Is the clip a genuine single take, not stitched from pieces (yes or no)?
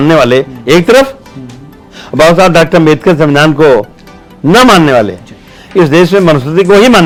yes